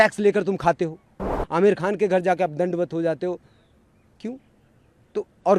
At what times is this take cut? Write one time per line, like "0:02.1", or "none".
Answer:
0:01.4

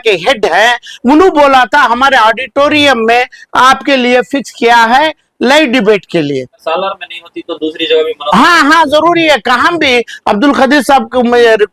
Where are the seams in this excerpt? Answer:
0:06.6

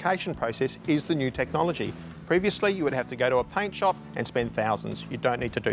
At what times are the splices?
none

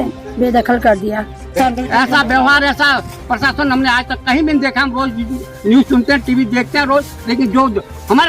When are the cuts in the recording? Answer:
0:01.6

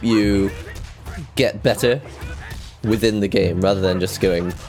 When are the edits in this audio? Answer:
none

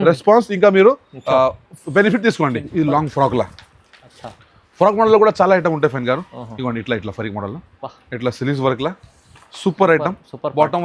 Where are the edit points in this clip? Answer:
0:02.6

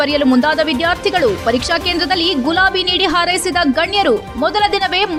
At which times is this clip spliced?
none

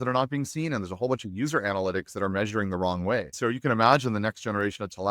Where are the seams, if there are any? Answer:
0:03.3

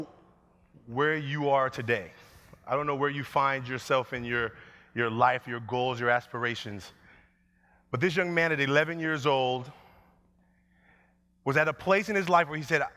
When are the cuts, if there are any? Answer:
0:02.6

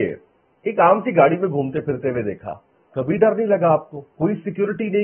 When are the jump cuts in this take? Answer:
none

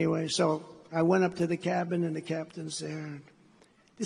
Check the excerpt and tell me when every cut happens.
none

